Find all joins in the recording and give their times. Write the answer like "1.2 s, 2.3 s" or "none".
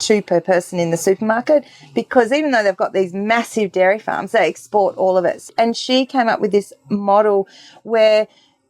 5.4 s